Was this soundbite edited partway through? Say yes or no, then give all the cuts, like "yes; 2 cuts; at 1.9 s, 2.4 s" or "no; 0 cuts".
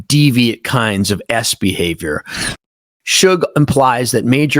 yes; 1 cut; at 2.6 s